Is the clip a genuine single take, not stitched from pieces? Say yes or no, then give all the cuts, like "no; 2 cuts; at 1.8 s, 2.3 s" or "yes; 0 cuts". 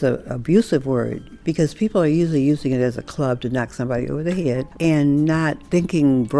no; 2 cuts; at 1.3 s, 4.7 s